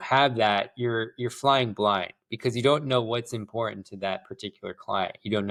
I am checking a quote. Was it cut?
no; 0 cuts

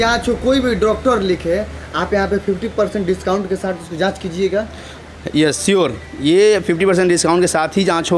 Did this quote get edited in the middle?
no; 0 cuts

